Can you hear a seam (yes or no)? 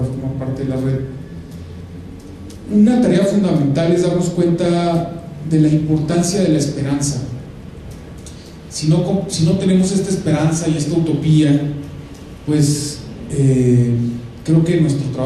no